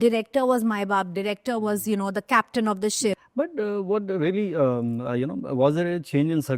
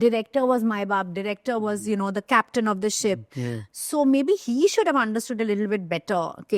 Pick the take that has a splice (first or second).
first